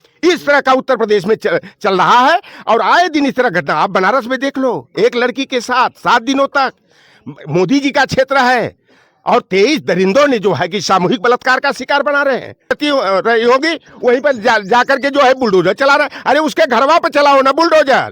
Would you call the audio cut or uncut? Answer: cut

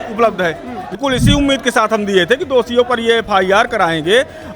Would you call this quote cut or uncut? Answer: cut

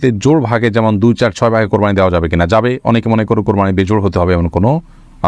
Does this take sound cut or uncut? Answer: uncut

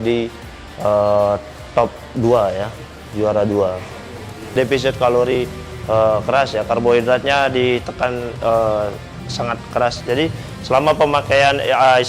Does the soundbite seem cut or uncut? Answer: cut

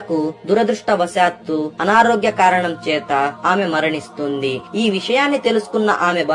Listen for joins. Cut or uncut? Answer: uncut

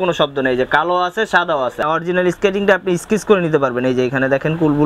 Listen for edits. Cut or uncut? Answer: cut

